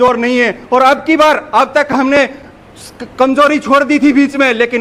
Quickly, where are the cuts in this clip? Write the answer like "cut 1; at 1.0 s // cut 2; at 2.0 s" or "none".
none